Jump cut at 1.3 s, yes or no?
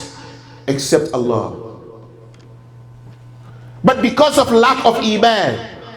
no